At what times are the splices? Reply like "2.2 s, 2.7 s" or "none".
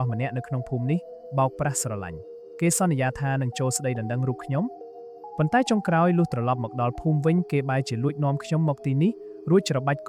none